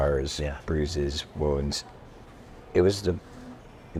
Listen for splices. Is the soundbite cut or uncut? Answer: uncut